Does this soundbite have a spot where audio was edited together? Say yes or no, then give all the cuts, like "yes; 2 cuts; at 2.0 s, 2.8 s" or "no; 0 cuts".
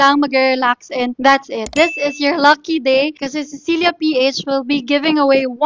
yes; 1 cut; at 1.7 s